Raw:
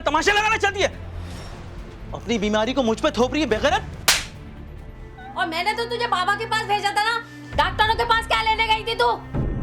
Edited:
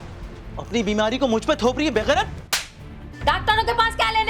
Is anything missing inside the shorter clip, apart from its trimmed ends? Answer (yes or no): yes